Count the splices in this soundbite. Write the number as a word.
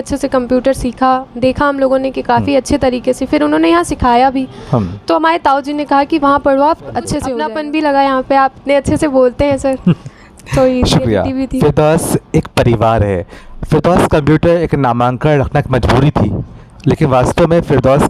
one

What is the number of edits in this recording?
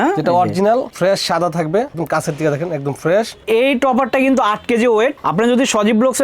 three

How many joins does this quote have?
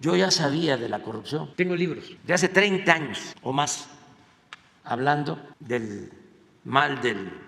one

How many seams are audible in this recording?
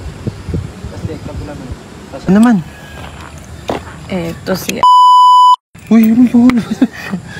one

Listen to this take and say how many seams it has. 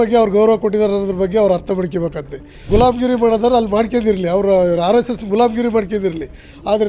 one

